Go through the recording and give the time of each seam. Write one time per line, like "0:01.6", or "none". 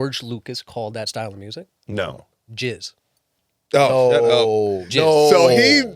0:01.1
0:02.3